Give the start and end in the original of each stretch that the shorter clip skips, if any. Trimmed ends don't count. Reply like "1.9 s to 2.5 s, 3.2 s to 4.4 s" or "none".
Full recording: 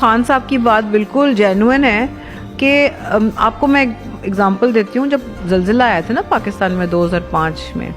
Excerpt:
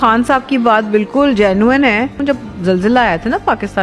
2.2 s to 5.0 s